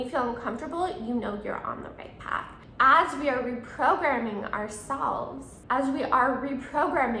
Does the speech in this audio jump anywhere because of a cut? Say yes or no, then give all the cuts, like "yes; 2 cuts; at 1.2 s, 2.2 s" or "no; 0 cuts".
yes; 2 cuts; at 2.6 s, 5.5 s